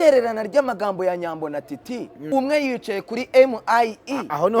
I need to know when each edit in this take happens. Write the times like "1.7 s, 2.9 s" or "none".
2.3 s